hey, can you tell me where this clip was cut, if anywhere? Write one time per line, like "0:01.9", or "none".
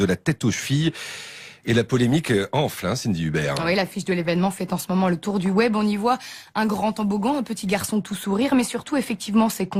none